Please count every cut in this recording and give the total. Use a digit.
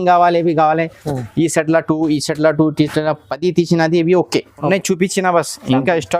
1